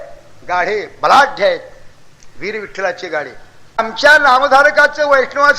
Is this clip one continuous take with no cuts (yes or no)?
no